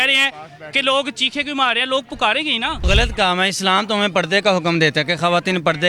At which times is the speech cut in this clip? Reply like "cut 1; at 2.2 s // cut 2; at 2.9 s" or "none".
cut 1; at 2.9 s